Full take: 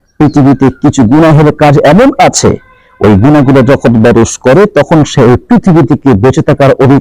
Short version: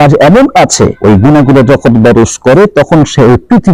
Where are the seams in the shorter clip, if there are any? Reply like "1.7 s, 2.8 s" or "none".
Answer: 1.0 s